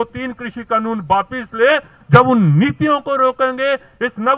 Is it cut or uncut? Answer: cut